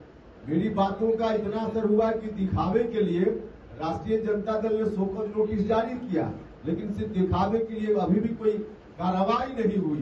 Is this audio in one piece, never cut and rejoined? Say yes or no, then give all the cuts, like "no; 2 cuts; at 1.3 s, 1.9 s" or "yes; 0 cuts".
yes; 0 cuts